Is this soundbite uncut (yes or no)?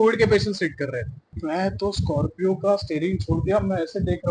no